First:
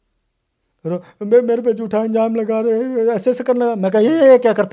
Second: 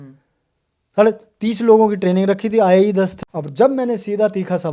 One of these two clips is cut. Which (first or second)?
second